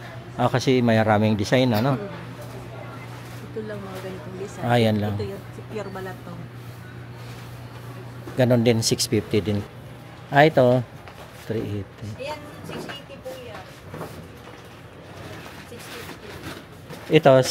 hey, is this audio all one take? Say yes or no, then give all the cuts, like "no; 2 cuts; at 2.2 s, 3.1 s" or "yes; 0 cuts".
no; 1 cut; at 9.6 s